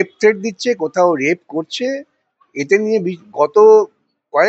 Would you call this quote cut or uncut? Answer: uncut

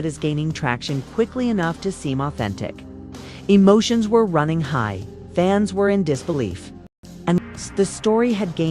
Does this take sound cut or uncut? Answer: cut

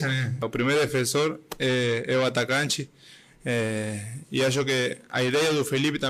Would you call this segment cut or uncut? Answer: uncut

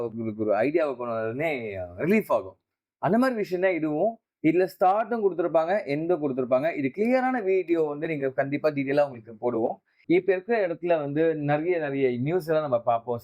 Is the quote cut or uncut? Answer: cut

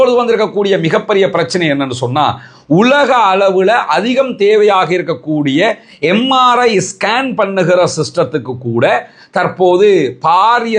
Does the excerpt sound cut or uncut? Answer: uncut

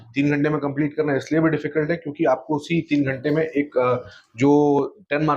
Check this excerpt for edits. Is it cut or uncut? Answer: uncut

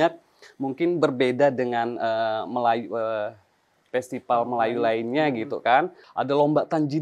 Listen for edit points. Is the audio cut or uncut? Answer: cut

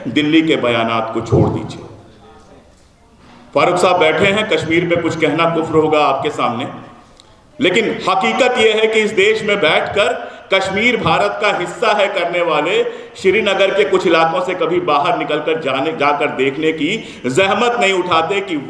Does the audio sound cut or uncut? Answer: uncut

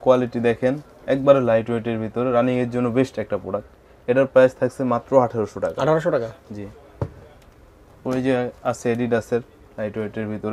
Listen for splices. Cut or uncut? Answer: uncut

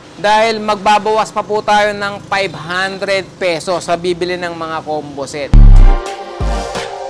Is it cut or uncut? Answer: cut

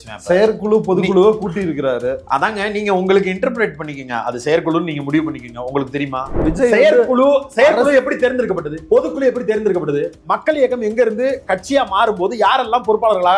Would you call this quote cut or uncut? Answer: cut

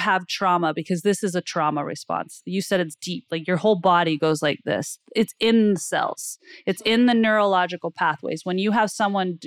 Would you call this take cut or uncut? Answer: uncut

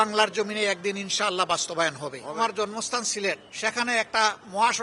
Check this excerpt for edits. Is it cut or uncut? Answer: cut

